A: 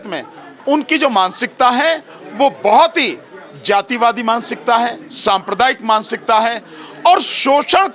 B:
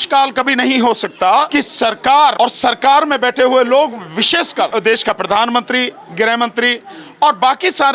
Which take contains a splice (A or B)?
B